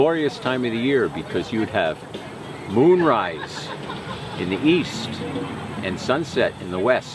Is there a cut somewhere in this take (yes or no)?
no